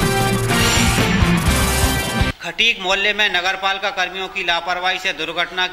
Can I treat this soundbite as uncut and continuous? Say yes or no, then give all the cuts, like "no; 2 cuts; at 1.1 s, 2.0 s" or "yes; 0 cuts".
no; 1 cut; at 2.3 s